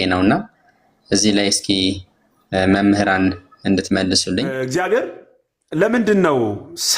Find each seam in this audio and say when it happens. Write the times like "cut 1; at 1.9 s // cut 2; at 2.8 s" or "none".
cut 1; at 4.5 s